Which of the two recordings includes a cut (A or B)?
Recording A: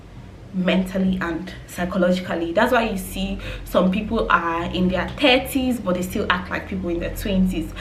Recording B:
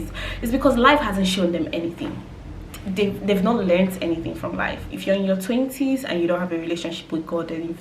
B